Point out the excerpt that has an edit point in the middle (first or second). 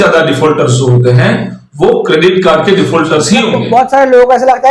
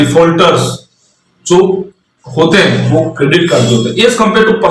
first